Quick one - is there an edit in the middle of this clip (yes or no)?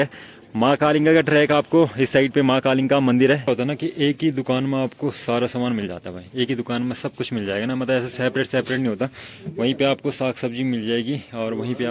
yes